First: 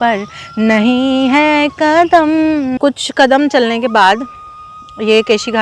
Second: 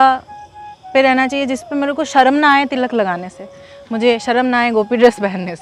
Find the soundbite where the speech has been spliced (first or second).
first